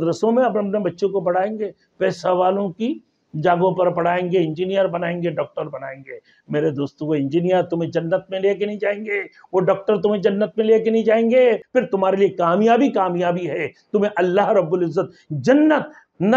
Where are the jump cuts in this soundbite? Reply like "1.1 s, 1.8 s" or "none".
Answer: 11.6 s